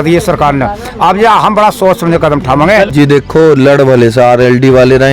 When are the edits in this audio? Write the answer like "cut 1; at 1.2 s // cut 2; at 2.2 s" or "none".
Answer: cut 1; at 2.9 s